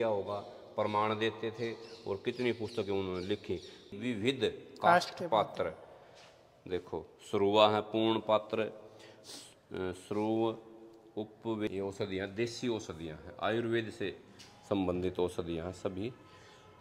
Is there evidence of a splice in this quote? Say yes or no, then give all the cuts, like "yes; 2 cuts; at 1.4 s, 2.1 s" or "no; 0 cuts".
yes; 2 cuts; at 3.9 s, 11.7 s